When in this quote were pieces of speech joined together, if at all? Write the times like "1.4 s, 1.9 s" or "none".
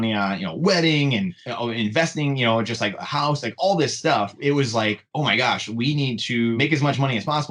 4.4 s, 6.5 s